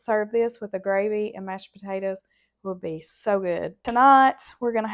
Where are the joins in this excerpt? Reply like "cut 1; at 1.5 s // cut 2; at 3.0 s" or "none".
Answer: cut 1; at 3.8 s